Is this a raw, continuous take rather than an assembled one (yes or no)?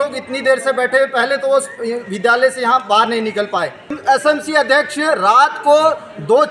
no